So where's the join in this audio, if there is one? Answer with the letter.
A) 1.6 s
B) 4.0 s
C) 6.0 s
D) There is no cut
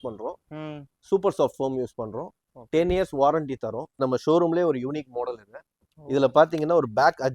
B